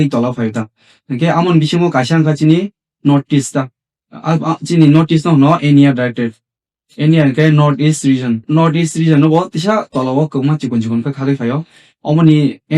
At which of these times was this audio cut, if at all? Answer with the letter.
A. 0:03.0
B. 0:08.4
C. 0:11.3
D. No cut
B